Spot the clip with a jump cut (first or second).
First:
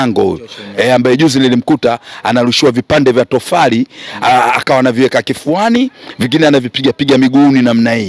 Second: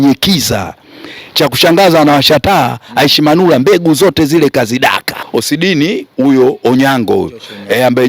second